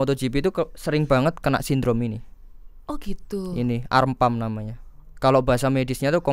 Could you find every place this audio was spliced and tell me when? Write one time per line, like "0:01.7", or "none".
none